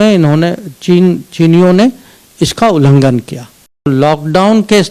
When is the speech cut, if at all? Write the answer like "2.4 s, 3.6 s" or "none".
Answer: 3.9 s